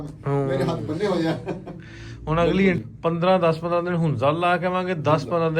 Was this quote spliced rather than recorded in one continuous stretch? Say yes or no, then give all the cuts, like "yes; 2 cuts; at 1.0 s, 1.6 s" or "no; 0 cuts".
yes; 1 cut; at 2.9 s